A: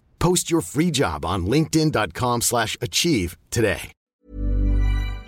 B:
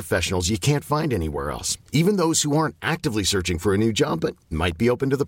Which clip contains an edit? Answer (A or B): A